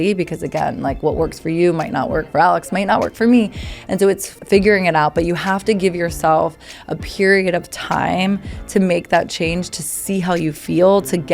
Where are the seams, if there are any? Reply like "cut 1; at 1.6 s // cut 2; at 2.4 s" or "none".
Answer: cut 1; at 4.3 s

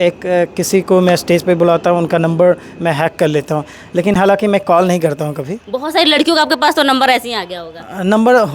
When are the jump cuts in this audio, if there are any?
none

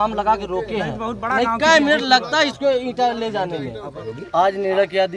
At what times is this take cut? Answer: cut 1; at 4.1 s

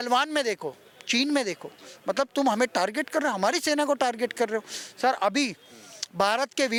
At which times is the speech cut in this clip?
none

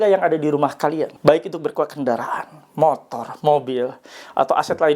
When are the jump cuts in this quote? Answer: cut 1; at 1.1 s

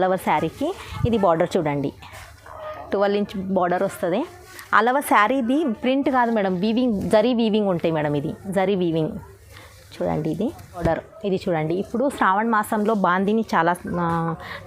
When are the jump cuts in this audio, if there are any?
cut 1; at 10.8 s

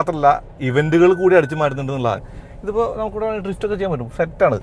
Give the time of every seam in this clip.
cut 1; at 2.3 s

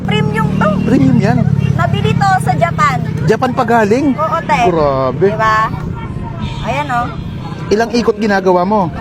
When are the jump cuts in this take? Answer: none

